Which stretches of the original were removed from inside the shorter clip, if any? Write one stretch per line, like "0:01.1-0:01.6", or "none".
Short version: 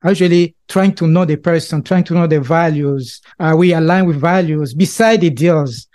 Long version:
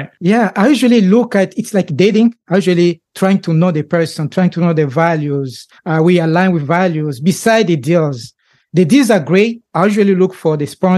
none